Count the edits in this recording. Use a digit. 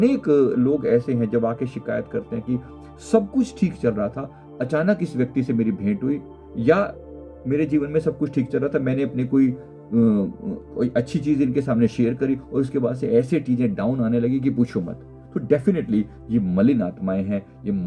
0